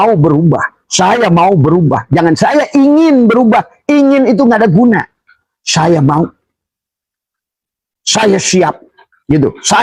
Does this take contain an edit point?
no; 0 cuts

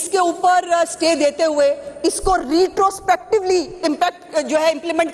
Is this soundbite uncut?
yes; 0 cuts

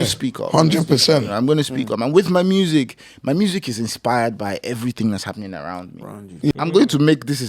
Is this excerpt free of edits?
no; 1 cut; at 6.5 s

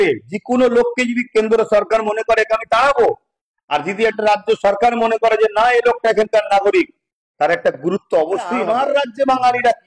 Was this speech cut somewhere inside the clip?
yes; 1 cut; at 8.5 s

